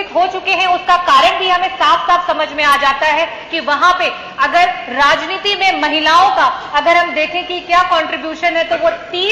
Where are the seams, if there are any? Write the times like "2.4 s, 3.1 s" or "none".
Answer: none